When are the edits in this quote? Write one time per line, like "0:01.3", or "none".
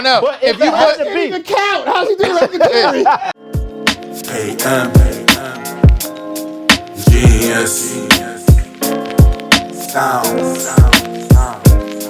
0:03.5